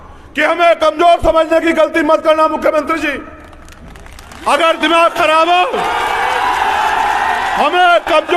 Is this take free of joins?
yes; 0 cuts

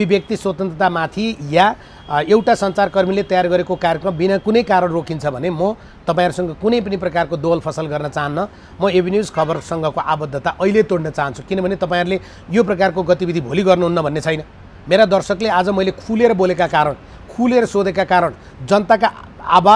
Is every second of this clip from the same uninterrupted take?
yes; 0 cuts

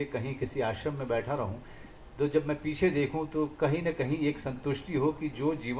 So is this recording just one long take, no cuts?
yes; 0 cuts

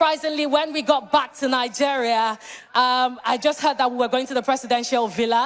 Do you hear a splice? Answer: no; 0 cuts

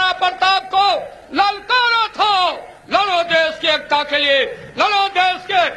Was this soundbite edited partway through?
no; 0 cuts

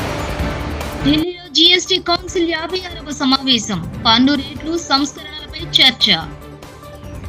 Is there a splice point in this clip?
yes; 1 cut; at 1.0 s

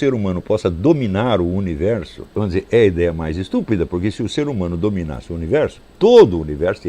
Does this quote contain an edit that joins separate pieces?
yes; 1 cut; at 2.2 s

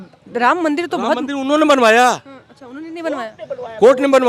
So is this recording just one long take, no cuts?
yes; 0 cuts

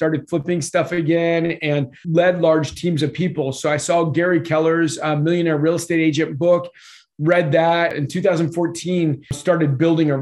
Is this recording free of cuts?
no; 3 cuts; at 2.0 s, 8.0 s, 9.4 s

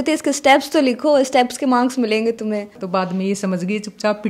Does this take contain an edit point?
yes; 1 cut; at 2.8 s

